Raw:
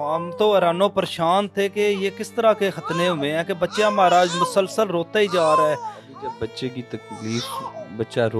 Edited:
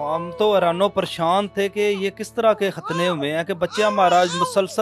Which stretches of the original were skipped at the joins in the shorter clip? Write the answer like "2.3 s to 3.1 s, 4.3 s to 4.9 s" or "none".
none